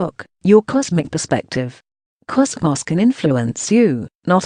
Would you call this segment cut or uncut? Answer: cut